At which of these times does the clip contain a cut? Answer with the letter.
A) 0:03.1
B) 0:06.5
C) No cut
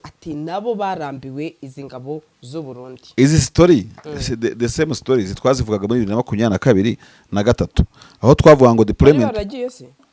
C